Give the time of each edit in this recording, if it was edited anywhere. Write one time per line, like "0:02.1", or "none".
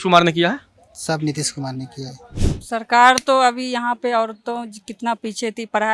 0:02.2